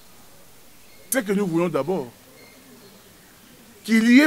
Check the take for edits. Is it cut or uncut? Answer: cut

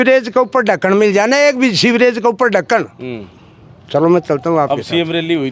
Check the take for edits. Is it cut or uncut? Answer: uncut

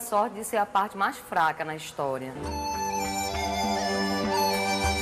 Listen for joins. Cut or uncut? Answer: uncut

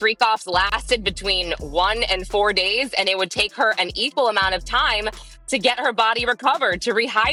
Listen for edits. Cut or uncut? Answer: uncut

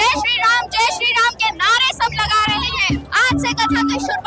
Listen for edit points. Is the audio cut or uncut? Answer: cut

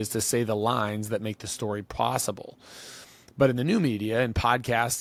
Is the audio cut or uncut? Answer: uncut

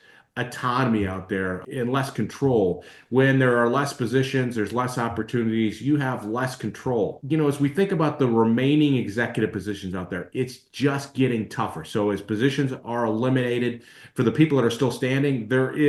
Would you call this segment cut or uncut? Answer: uncut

